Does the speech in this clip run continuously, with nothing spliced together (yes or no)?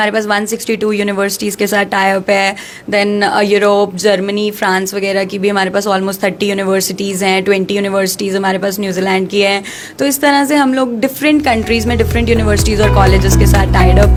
yes